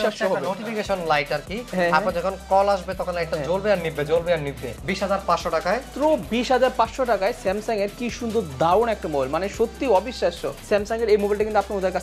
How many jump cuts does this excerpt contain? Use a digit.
3